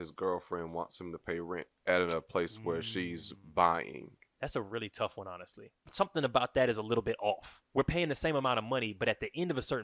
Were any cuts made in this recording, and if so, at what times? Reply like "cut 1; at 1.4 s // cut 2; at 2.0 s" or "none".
cut 1; at 1.7 s // cut 2; at 4.3 s // cut 3; at 5.8 s